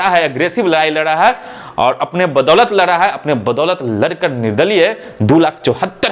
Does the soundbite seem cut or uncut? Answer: uncut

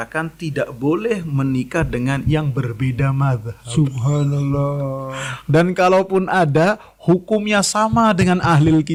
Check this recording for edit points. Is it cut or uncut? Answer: uncut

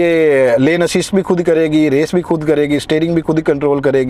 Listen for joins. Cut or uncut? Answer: uncut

